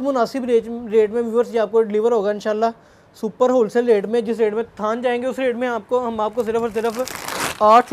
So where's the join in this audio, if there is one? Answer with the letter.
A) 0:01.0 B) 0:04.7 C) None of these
C